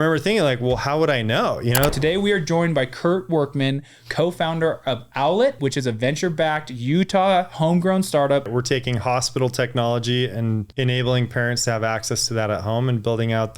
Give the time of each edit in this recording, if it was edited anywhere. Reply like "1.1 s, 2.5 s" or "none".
1.9 s, 5.6 s, 8.5 s, 10.7 s